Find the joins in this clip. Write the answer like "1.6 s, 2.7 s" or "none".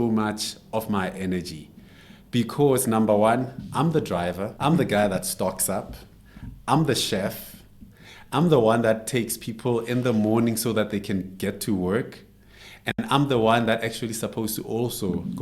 4.5 s